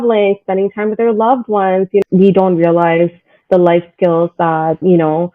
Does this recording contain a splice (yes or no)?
yes